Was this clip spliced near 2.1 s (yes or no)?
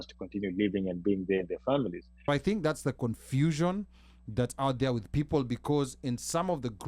yes